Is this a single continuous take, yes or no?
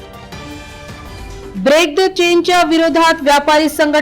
yes